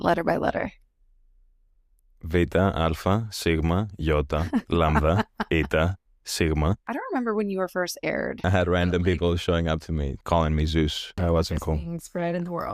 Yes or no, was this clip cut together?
yes